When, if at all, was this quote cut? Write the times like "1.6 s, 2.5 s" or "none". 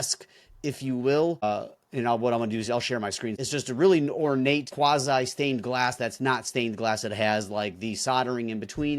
1.4 s, 3.4 s, 4.7 s